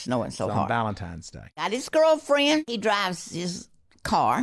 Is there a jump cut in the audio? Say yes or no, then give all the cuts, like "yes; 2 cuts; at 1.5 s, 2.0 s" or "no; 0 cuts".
yes; 2 cuts; at 1.7 s, 2.7 s